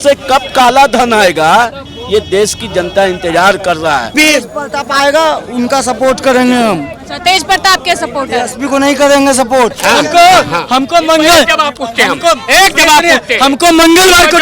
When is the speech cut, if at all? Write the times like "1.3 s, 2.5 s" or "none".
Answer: 4.1 s, 9.8 s